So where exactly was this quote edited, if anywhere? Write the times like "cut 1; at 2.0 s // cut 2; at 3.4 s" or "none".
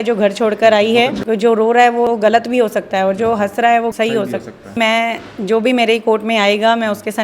cut 1; at 1.2 s // cut 2; at 4.7 s